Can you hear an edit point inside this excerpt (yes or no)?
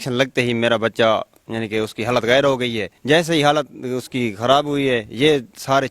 yes